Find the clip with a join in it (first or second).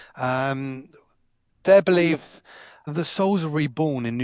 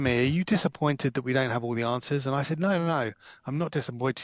first